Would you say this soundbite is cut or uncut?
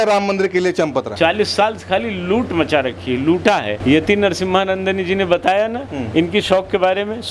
cut